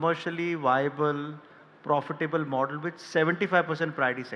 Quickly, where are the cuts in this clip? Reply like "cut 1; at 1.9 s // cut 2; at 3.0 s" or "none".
none